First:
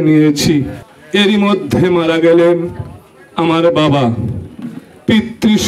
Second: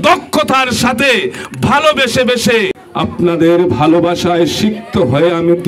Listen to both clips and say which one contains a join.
second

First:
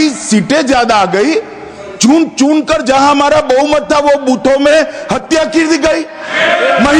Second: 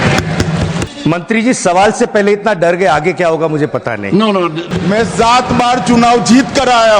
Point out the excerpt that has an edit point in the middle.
second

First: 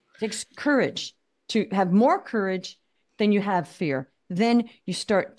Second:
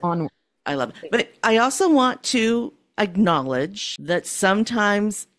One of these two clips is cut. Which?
second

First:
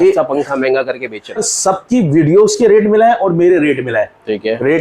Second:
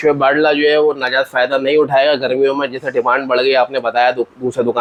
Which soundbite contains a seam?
first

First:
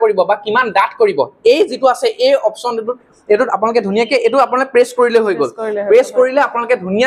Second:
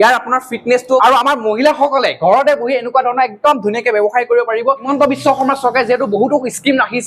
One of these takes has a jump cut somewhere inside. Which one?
second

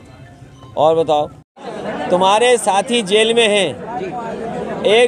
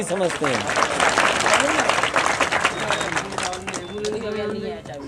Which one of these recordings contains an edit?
first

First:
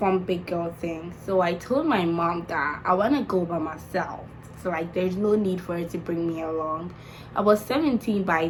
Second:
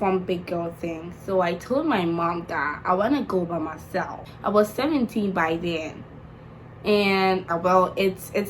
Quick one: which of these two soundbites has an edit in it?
second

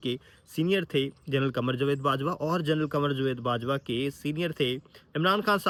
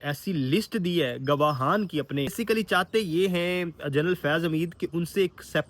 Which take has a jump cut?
second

